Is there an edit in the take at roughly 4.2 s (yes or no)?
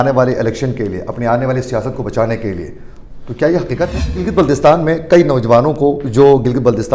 yes